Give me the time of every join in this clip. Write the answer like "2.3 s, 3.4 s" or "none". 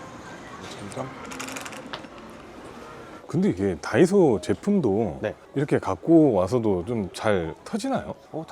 3.2 s